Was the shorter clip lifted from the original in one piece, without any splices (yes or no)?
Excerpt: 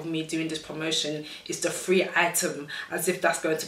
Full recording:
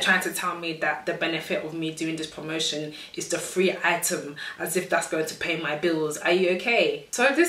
yes